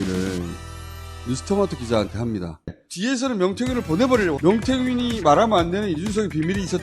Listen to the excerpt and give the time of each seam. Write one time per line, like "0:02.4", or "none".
0:02.7
0:04.4